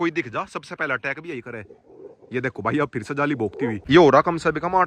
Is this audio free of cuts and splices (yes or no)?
no